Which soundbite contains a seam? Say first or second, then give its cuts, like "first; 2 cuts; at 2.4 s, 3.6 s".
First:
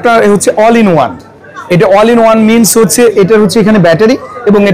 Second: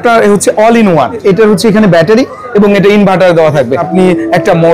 second; 2 cuts; at 1.2 s, 3.9 s